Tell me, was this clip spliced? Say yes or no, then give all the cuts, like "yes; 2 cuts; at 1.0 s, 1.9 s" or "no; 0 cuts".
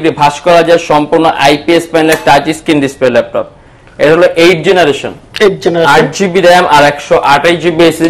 no; 0 cuts